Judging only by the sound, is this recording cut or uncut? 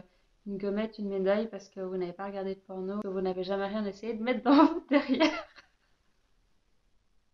cut